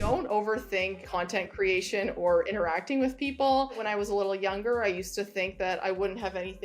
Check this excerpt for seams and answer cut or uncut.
cut